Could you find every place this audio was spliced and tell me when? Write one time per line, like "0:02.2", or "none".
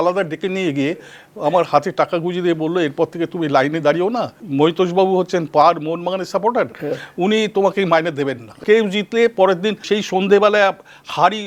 0:04.4
0:08.6
0:09.8